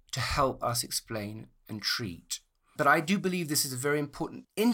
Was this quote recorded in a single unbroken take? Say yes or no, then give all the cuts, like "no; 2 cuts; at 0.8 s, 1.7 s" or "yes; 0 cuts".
yes; 0 cuts